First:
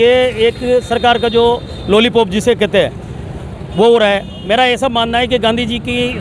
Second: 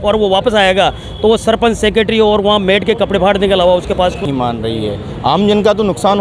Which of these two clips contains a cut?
second; 1 cut; at 4.3 s

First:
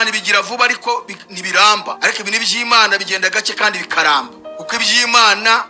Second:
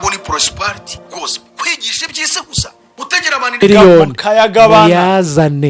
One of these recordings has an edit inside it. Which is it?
second; 1 cut; at 3.6 s

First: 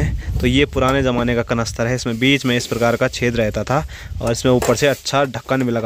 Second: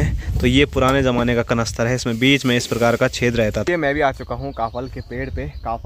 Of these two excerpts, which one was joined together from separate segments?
second; 1 cut; at 3.6 s

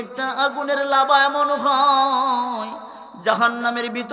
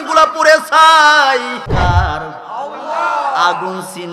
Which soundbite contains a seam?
second; 1 cut; at 1.6 s

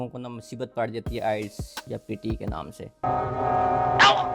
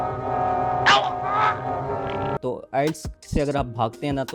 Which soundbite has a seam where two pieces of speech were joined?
second; 2 cuts; at 2.4 s, 3.1 s

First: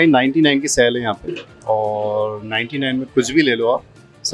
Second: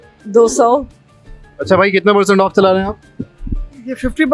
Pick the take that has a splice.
second; 1 cut; at 1.0 s

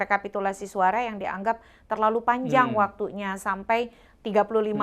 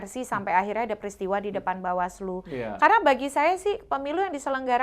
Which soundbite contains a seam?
second; 1 cut; at 2.7 s

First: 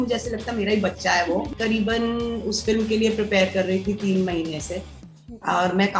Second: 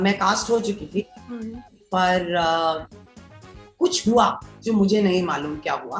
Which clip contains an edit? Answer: first; 1 cut; at 1.5 s

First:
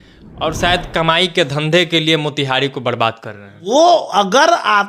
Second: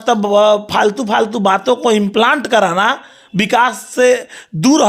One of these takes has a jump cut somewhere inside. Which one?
first; 1 cut; at 3.6 s

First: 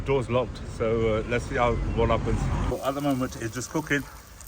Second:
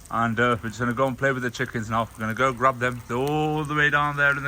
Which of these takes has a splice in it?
first; 1 cut; at 2.7 s

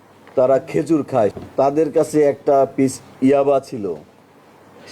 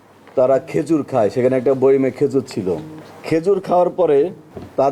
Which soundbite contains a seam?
first; 1 cut; at 1.3 s

